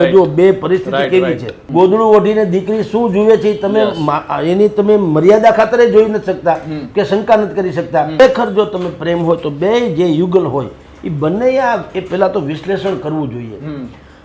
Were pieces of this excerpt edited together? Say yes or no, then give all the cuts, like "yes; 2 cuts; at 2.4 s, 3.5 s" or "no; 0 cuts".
yes; 2 cuts; at 1.5 s, 8.2 s